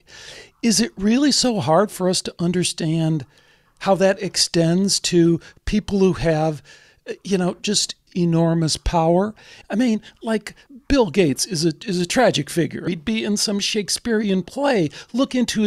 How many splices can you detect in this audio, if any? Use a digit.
4